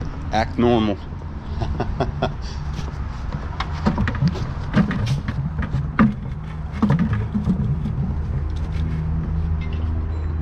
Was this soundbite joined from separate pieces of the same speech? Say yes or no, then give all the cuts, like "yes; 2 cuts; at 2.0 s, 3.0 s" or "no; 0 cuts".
no; 0 cuts